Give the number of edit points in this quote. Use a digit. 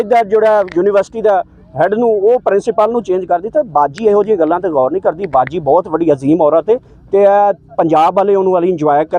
0